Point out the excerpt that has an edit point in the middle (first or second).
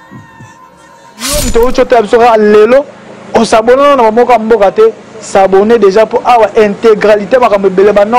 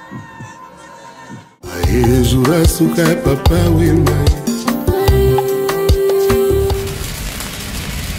first